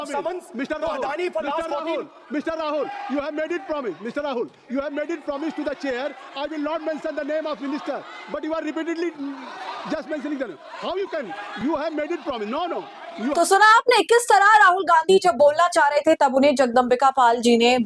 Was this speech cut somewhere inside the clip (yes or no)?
no